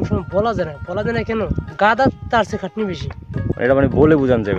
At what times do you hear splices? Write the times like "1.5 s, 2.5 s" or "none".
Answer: 1.7 s, 3.6 s